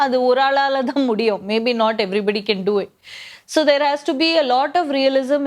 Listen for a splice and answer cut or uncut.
uncut